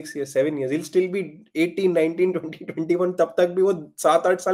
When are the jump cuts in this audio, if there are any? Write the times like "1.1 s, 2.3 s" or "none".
none